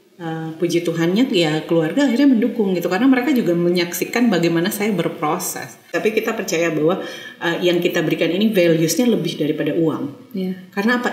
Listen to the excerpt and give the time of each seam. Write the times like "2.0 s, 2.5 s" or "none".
5.9 s